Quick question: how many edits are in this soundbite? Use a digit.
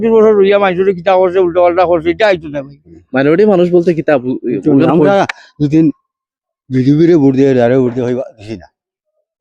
1